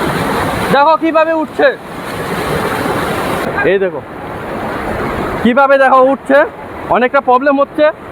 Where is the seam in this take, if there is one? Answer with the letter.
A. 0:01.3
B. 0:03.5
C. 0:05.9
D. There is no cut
B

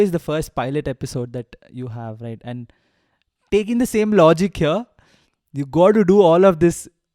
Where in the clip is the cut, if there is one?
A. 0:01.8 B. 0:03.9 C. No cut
C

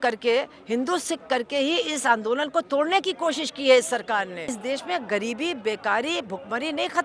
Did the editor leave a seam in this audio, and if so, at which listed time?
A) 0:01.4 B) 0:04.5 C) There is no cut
B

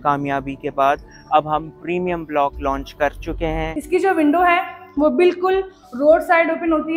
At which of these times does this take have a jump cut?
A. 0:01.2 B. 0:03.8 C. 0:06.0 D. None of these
B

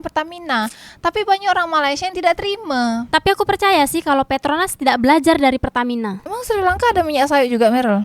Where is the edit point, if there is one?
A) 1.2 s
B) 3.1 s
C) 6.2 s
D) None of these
C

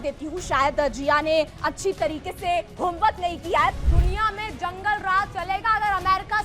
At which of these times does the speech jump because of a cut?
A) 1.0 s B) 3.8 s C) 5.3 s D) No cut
B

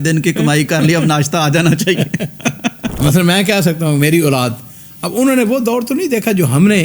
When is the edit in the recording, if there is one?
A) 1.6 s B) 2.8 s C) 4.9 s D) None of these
B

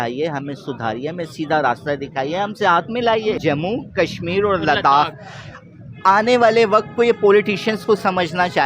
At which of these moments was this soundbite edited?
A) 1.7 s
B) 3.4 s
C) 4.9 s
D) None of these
B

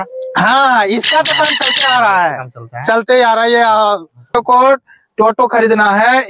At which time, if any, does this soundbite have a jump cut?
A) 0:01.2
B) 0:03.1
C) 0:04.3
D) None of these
C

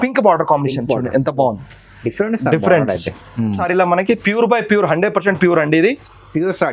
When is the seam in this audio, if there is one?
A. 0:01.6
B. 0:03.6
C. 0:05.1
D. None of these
B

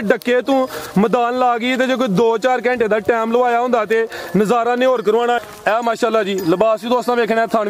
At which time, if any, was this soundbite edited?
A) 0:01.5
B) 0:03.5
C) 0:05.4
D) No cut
C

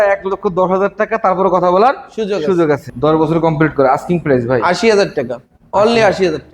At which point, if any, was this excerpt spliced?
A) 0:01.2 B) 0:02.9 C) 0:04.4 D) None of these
B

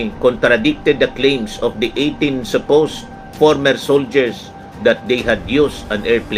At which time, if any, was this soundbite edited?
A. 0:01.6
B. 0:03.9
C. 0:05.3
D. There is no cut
D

